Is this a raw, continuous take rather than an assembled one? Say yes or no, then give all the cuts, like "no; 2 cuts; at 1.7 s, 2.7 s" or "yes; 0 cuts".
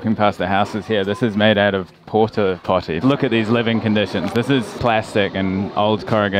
no; 2 cuts; at 3.0 s, 4.7 s